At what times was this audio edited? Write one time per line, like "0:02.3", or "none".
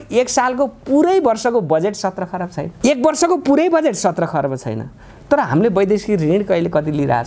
0:02.6